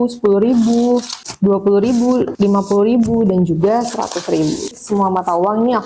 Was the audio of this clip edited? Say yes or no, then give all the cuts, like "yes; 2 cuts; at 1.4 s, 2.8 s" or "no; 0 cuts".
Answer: yes; 3 cuts; at 1.2 s, 2.3 s, 4.7 s